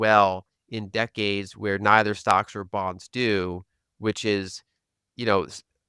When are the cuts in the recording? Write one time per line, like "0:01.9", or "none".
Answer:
none